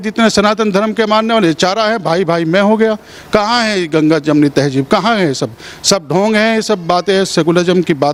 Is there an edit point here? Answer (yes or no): no